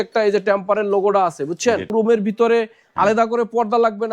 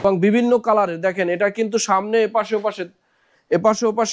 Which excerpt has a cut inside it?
first; 1 cut; at 1.9 s

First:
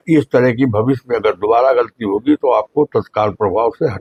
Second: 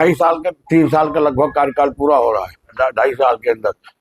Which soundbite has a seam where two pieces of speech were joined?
second; 1 cut; at 2.7 s

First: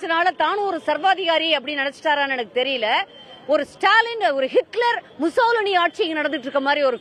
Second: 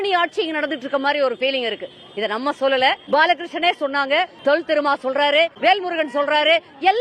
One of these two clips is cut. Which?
second; 3 cuts; at 3.0 s, 4.3 s, 5.5 s

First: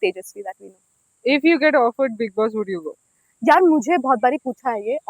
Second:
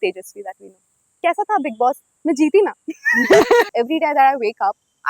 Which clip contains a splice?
second; 2 cuts; at 1.2 s, 3.7 s

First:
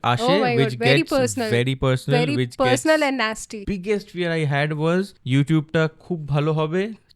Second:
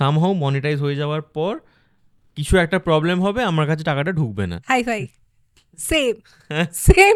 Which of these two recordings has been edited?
first; 2 cuts; at 3.5 s, 5.2 s

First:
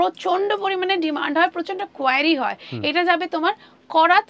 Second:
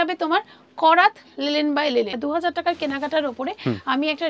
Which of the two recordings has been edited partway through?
second; 1 cut; at 2.1 s

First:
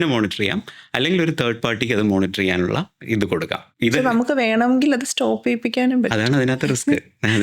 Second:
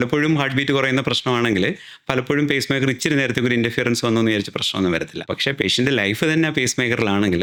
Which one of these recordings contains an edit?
first; 1 cut; at 3.7 s

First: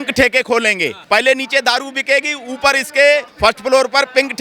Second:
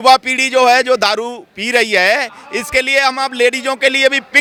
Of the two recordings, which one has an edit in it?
first; 2 cuts; at 0.9 s, 3.3 s

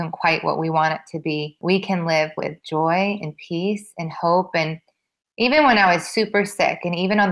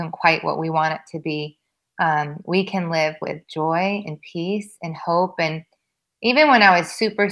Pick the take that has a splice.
first; 1 cut; at 1.5 s

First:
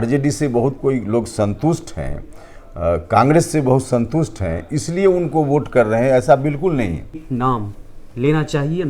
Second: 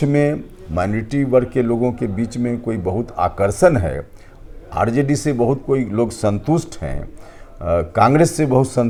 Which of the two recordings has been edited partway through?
first; 1 cut; at 7.2 s

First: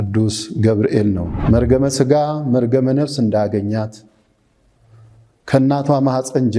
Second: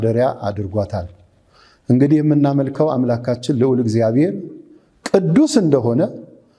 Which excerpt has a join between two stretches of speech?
first; 1 cut; at 1.3 s

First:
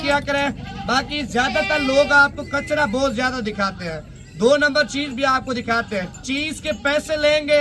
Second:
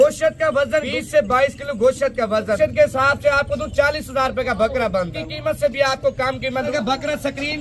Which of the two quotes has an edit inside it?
second; 4 cuts; at 0.9 s, 2.6 s, 5.2 s, 6.7 s

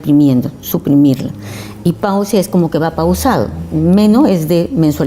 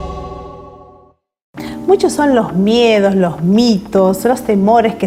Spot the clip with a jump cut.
first; 1 cut; at 2.9 s

